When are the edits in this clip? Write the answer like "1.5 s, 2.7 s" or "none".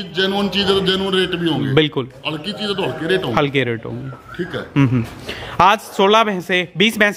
none